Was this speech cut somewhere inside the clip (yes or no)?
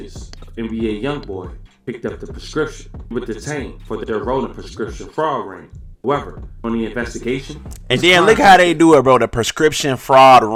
no